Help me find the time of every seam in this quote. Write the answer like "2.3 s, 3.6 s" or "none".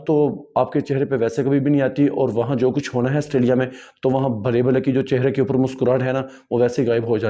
none